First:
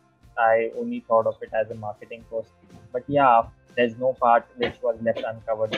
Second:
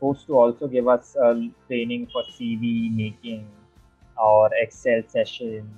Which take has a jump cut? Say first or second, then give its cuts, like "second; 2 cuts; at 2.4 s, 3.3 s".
first; 1 cut; at 3.6 s